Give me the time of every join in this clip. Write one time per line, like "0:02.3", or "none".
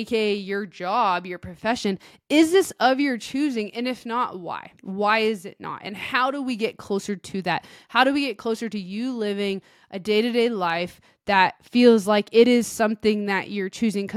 0:04.7